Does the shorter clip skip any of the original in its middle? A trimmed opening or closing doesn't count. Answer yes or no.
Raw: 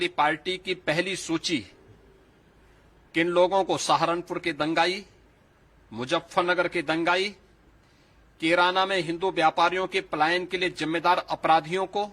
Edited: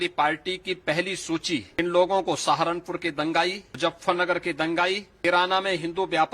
yes